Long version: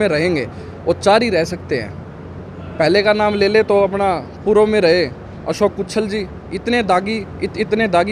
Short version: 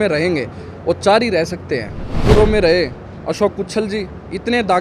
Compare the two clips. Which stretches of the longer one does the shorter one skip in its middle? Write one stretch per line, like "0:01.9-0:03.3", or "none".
0:02.1-0:04.3